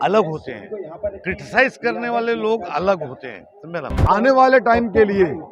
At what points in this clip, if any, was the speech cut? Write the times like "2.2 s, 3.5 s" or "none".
4.0 s